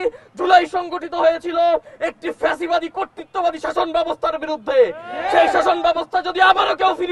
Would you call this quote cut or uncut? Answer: uncut